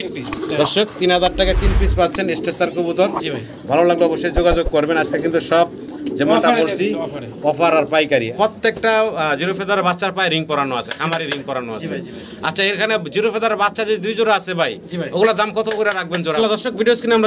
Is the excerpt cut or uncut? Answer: cut